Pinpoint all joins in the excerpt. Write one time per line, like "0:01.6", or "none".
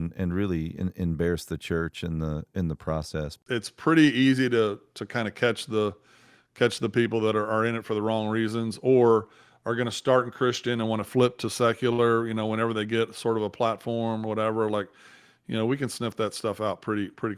0:03.4